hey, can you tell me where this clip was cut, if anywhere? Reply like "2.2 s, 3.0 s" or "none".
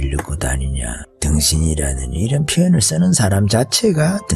1.1 s